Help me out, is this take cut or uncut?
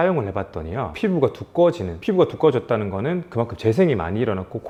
uncut